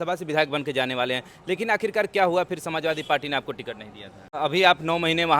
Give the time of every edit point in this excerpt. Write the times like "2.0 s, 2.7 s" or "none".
4.3 s